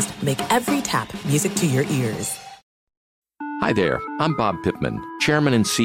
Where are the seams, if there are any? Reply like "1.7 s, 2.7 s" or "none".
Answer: 2.6 s